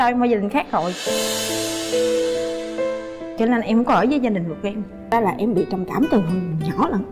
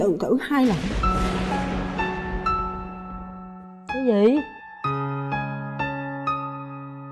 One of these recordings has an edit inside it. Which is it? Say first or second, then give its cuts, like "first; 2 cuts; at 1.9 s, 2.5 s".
first; 1 cut; at 5.1 s